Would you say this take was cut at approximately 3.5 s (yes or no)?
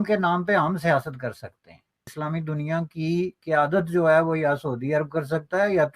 no